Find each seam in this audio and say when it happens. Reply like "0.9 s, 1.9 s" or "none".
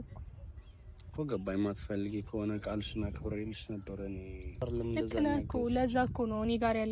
4.6 s